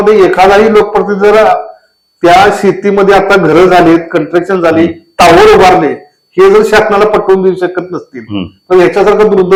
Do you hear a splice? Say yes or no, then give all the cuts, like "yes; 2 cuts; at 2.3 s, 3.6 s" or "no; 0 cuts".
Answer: no; 0 cuts